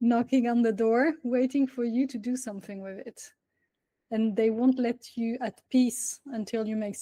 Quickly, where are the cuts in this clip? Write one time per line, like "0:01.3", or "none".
none